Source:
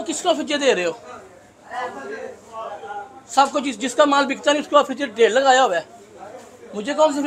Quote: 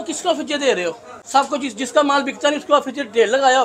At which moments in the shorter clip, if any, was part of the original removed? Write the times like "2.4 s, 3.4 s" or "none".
1.1 s